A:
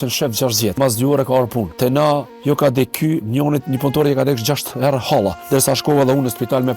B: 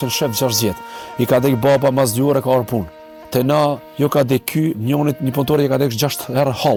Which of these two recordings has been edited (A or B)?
A